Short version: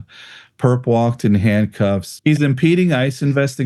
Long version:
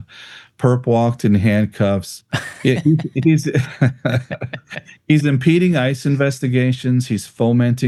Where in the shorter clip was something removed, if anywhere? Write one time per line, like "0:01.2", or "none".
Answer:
0:02.1